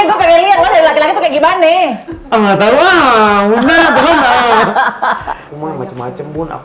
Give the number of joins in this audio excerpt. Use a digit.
1